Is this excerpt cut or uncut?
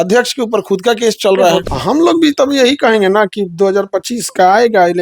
cut